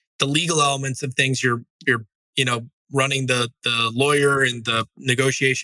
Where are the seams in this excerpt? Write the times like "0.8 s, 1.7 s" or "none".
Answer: none